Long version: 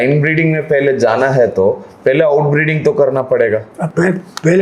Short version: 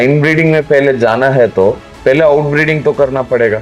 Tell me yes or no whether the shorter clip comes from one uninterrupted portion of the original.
yes